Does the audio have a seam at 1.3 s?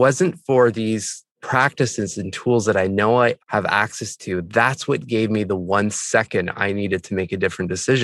yes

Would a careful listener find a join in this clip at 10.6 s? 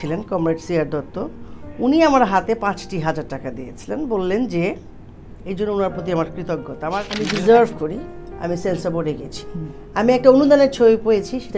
no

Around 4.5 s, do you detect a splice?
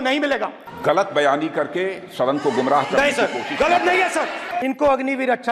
yes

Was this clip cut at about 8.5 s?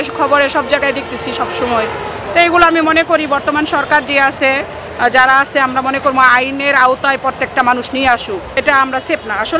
yes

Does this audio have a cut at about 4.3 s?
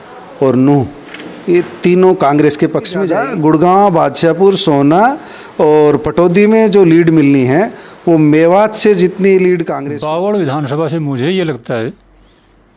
no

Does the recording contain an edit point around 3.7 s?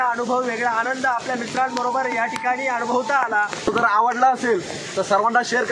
yes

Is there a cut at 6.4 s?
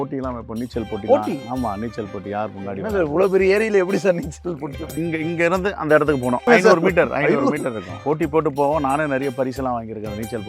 yes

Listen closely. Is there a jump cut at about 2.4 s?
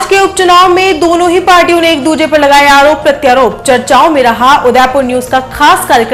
no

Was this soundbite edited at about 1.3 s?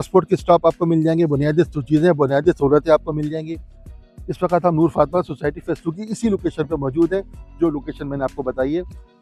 no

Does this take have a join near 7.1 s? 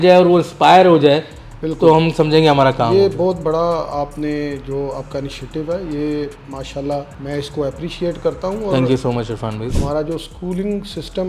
yes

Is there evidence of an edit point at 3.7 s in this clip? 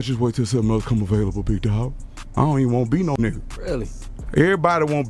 no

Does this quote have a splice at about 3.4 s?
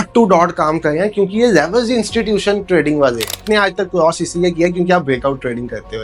yes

